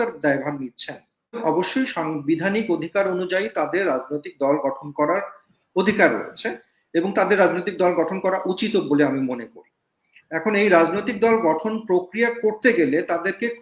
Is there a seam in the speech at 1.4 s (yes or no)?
yes